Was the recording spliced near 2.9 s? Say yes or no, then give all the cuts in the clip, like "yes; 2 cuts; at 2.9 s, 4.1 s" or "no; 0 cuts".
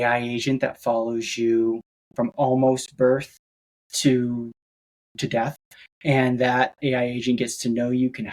no; 0 cuts